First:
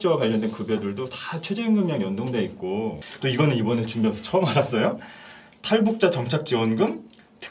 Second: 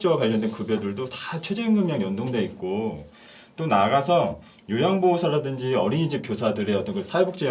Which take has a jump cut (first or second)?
first